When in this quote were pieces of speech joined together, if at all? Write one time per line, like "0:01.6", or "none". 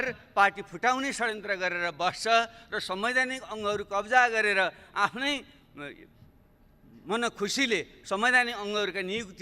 none